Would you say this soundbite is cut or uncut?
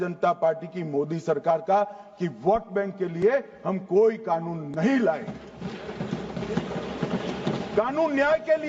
uncut